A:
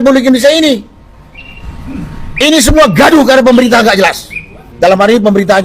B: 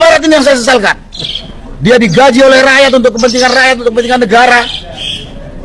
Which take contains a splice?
A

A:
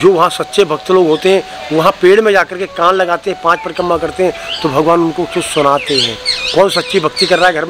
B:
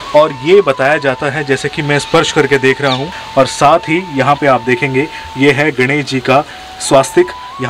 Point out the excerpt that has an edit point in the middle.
B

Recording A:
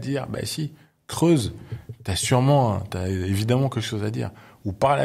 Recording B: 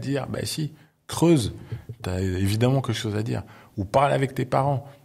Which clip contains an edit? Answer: B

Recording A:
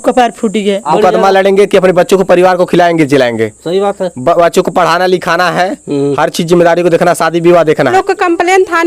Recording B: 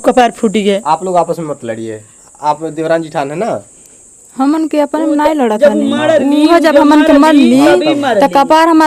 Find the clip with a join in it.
A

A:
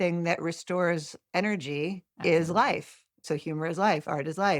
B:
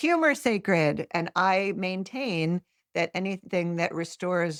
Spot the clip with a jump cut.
A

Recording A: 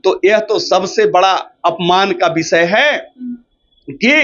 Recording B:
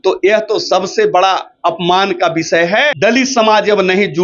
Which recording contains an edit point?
B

